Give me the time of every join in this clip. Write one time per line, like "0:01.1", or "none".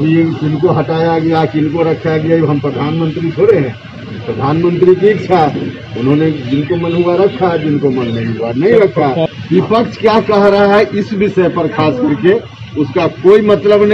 0:09.3